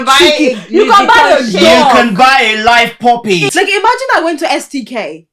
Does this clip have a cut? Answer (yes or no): yes